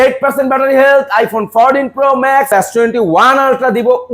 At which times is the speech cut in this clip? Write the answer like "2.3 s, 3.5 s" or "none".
2.5 s